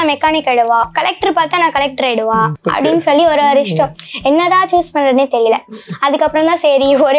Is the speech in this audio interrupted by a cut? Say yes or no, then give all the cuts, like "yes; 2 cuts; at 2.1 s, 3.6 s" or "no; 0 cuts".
yes; 1 cut; at 2.5 s